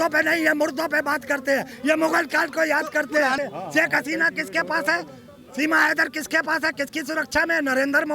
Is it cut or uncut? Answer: cut